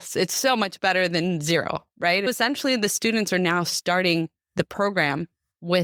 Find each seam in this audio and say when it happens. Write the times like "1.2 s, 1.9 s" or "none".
none